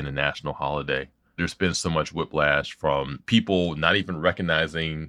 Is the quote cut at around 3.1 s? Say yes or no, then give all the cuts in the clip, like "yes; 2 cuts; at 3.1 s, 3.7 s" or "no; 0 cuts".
yes; 2 cuts; at 1.4 s, 3.1 s